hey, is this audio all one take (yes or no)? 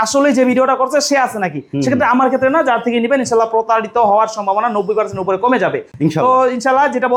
yes